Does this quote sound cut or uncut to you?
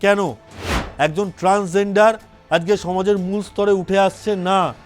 uncut